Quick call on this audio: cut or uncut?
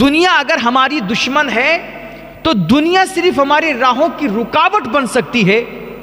uncut